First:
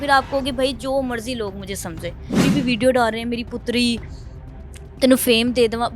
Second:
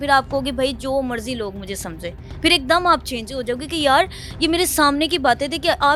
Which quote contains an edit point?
first; 1 cut; at 2.4 s

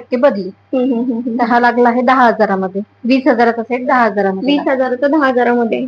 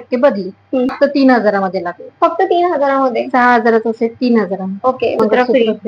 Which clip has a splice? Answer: second; 2 cuts; at 0.9 s, 5.2 s

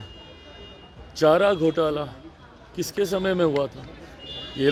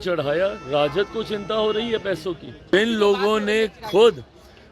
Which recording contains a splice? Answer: second; 1 cut; at 2.7 s

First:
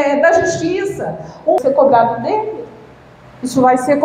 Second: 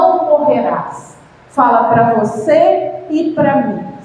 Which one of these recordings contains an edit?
first; 1 cut; at 1.6 s

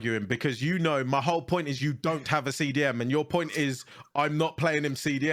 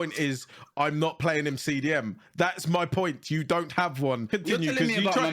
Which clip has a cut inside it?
second; 1 cut; at 4.3 s

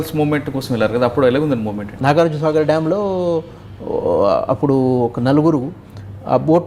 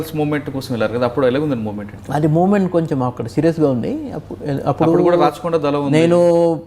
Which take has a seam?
first; 1 cut; at 1.9 s

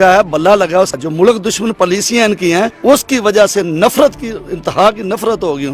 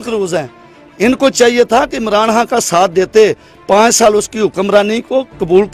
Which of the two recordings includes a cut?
first; 1 cut; at 1.0 s

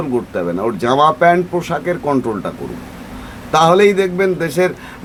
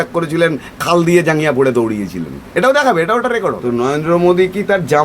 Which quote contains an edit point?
second; 1 cut; at 3.6 s

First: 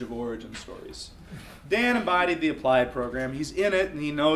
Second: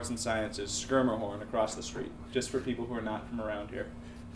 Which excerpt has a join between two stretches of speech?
second; 1 cut; at 1.1 s

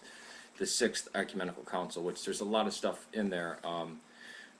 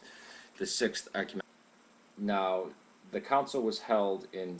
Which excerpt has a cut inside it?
first; 1 cut; at 1.4 s

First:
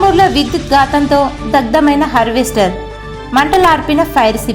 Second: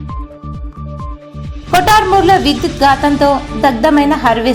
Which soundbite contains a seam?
second; 1 cut; at 1.0 s

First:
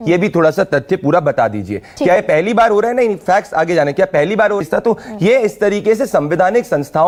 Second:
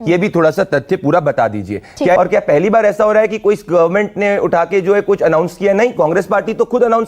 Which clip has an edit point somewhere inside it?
second; 1 cut; at 2.2 s

